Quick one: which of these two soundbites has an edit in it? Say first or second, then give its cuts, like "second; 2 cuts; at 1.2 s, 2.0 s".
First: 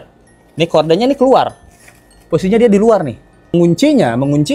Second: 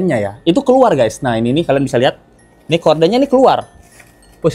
first; 1 cut; at 3.5 s